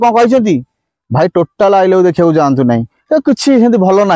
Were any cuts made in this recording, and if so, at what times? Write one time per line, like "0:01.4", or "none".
0:03.0